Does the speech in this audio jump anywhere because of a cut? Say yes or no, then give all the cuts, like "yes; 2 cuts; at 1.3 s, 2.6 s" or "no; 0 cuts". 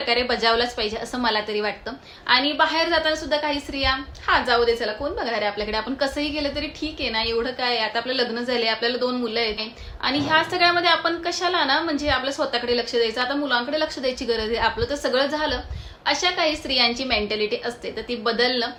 no; 0 cuts